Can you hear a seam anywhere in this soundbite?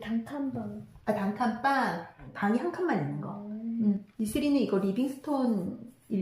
yes; 2 cuts; at 2.1 s, 4.1 s

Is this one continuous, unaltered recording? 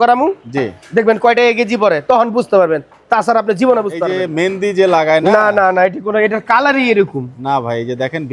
no; 1 cut; at 4.2 s

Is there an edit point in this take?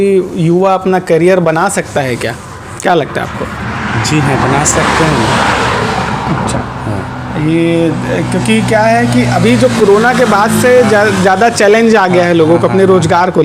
no; 0 cuts

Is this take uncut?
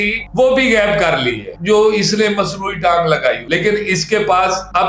no; 1 cut; at 1.4 s

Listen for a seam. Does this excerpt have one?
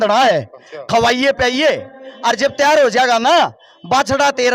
no; 0 cuts

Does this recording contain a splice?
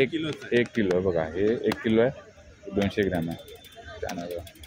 no; 0 cuts

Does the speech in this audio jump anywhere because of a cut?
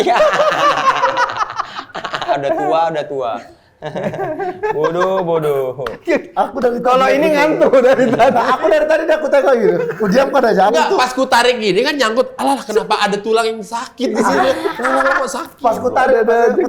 no; 0 cuts

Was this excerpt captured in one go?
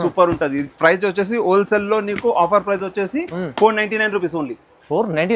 yes; 0 cuts

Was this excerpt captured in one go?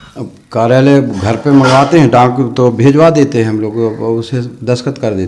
yes; 0 cuts

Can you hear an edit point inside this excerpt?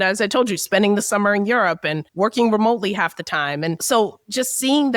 yes; 1 cut; at 3.8 s

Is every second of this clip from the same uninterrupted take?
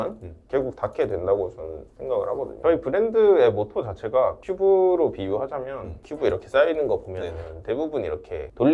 no; 1 cut; at 2.5 s

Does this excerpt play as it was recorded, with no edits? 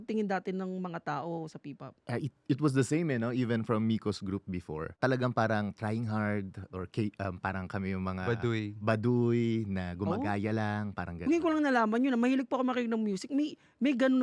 yes; 0 cuts

